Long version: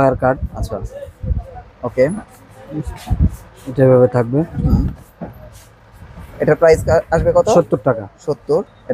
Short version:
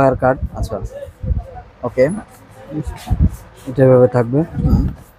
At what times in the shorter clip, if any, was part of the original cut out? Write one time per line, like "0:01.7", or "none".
none